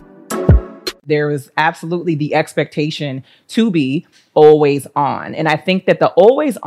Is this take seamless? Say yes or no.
no